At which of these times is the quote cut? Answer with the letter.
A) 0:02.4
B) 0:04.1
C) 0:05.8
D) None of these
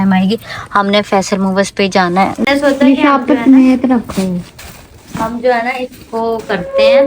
A